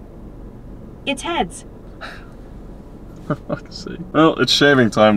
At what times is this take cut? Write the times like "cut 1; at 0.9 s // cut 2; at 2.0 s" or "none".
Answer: cut 1; at 4.0 s